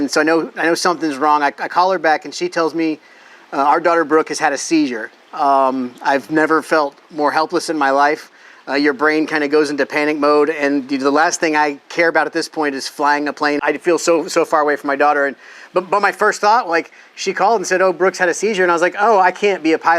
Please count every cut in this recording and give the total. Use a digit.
1